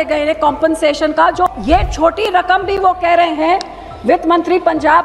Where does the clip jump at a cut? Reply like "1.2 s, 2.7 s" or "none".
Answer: 1.5 s